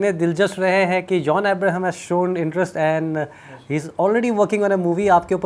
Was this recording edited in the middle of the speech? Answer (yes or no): no